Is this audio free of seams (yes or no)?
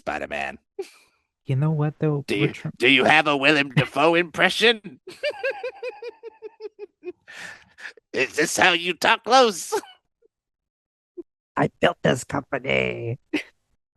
no